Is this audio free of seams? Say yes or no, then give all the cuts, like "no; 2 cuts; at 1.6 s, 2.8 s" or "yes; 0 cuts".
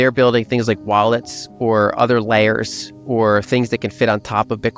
yes; 0 cuts